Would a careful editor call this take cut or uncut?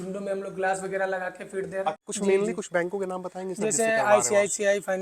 cut